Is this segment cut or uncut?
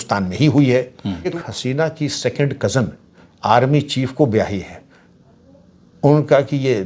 cut